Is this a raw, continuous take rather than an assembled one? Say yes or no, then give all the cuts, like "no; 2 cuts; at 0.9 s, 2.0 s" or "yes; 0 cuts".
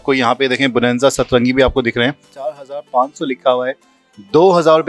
no; 1 cut; at 2.3 s